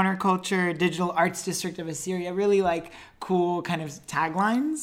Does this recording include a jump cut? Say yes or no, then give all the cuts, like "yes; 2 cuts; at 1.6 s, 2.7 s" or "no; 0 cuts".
no; 0 cuts